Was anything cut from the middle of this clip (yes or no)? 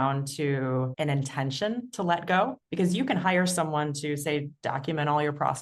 yes